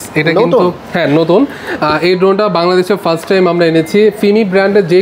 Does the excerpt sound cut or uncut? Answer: uncut